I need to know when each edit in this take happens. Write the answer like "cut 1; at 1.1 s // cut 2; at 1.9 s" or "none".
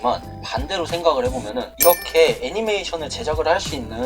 cut 1; at 1.7 s